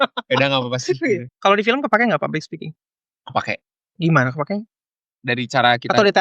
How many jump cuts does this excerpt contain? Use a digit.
0